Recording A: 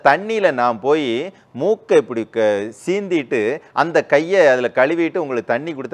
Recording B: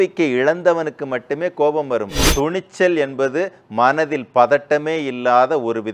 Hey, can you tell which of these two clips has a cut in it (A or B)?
B